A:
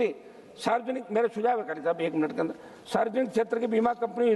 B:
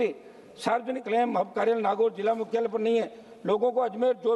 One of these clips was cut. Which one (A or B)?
B